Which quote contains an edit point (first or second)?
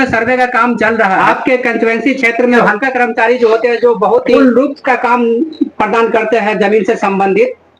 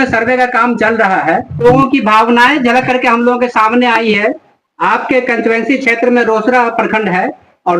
first